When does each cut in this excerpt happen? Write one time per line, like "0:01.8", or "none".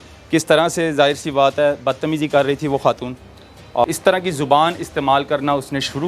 0:03.8